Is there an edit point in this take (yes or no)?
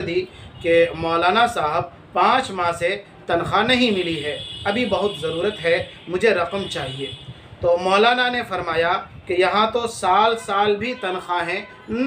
no